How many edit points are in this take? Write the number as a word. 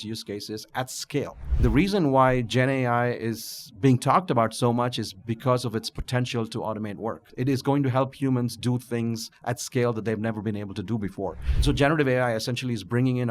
three